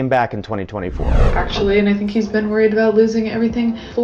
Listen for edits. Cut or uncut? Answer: cut